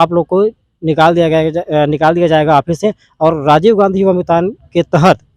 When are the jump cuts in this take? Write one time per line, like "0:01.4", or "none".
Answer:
none

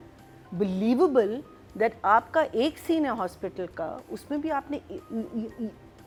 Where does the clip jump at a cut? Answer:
none

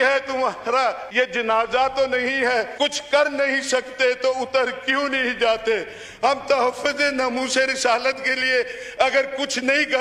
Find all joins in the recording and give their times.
0:01.0
0:02.7

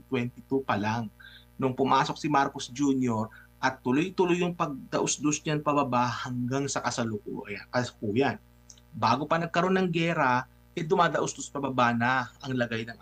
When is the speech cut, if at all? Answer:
none

